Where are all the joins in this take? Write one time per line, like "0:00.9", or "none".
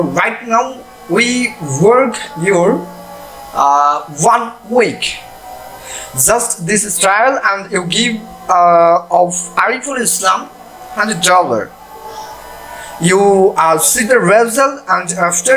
none